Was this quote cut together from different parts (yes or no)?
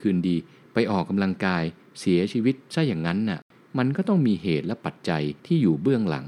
yes